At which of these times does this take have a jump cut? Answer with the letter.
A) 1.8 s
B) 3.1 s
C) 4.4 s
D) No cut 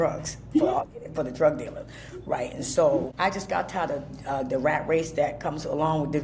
B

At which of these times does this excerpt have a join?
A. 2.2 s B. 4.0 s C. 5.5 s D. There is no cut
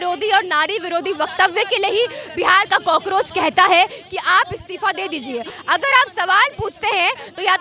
C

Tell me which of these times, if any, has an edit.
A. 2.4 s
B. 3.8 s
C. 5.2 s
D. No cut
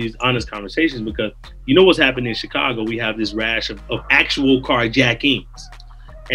D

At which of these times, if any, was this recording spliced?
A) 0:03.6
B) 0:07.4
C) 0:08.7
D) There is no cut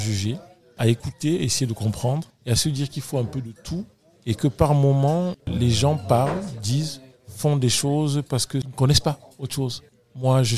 C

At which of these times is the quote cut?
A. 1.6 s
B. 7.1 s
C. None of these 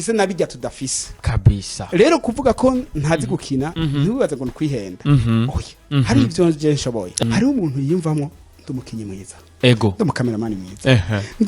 B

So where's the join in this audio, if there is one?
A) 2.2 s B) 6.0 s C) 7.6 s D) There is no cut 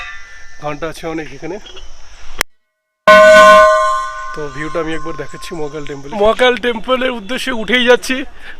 B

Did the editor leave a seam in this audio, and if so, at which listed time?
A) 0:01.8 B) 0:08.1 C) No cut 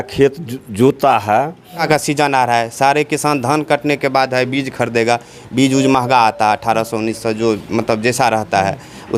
A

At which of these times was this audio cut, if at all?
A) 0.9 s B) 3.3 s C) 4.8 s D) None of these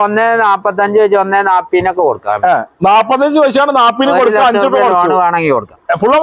D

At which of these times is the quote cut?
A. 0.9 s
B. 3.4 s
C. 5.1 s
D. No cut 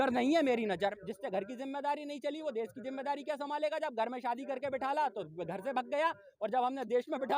A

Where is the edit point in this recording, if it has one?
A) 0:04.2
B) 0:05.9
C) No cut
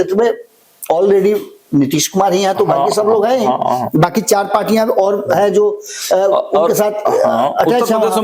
C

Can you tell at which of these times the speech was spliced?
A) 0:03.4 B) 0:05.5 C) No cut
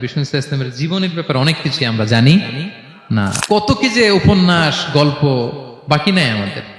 A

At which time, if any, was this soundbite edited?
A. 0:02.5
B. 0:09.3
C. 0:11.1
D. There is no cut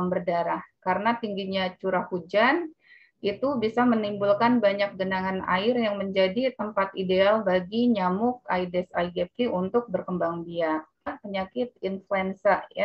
C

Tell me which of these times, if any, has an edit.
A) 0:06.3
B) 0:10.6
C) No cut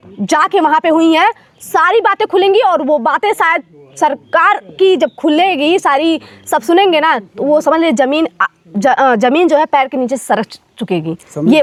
C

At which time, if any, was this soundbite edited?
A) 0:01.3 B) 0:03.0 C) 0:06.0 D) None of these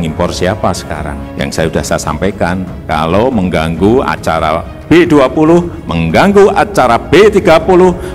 A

